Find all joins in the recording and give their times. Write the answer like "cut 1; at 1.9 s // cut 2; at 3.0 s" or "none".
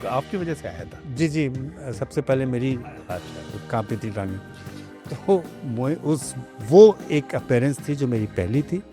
none

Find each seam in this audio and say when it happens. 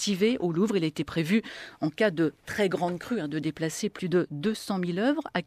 cut 1; at 3.1 s

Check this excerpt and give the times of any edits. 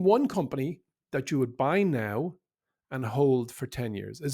none

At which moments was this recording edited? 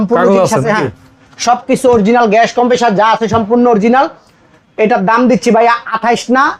none

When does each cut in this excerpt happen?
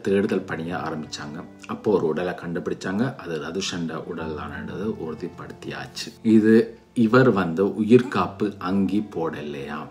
cut 1; at 6.0 s

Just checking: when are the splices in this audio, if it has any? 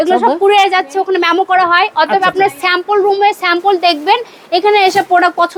none

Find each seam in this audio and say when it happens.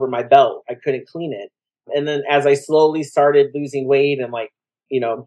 none

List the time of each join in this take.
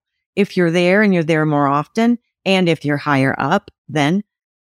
none

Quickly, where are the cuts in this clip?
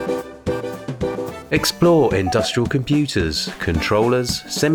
cut 1; at 1.4 s

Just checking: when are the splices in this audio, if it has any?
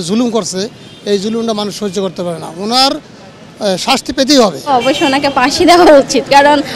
cut 1; at 4.7 s

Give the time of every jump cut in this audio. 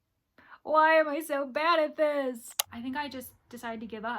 cut 1; at 2.5 s

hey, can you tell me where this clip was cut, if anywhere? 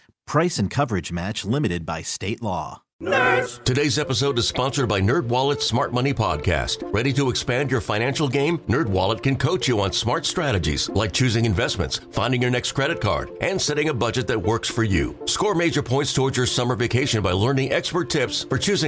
cut 1; at 2.8 s

